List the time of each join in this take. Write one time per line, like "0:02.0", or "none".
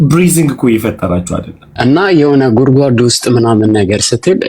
0:01.6